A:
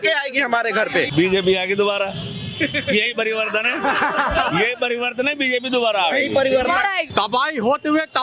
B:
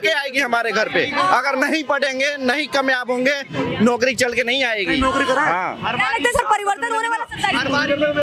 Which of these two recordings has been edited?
A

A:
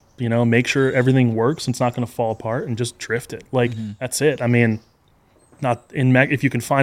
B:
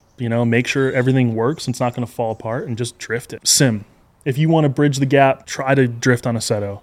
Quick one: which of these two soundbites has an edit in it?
B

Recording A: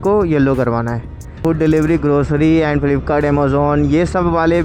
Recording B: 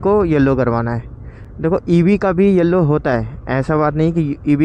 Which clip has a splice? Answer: A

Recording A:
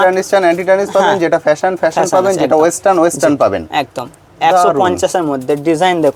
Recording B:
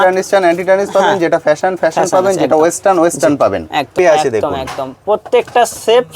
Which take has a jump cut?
B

